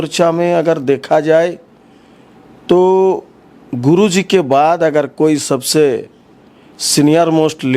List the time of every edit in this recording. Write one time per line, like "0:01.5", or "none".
none